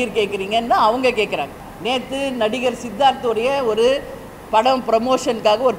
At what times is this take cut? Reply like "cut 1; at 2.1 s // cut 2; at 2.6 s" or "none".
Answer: cut 1; at 1.6 s